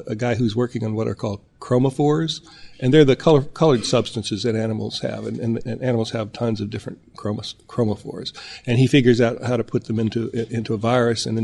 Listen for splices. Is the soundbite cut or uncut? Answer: uncut